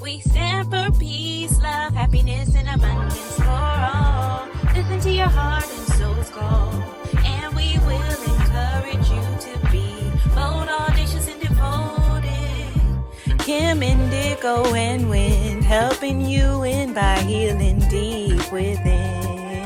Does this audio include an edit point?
no; 0 cuts

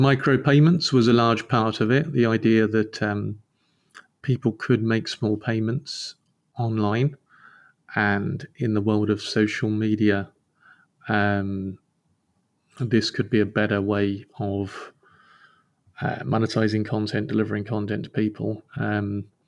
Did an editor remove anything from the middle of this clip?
no; 0 cuts

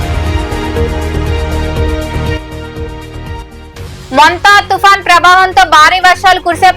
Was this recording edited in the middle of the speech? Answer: no; 0 cuts

